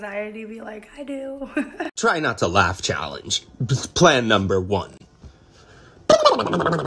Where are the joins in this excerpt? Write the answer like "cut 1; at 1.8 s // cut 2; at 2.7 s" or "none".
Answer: cut 1; at 1.9 s

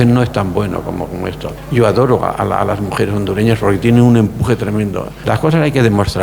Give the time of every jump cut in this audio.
cut 1; at 1.5 s // cut 2; at 5.1 s

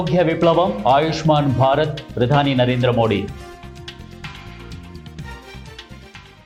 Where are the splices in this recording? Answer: none

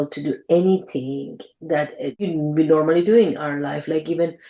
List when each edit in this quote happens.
cut 1; at 2.2 s

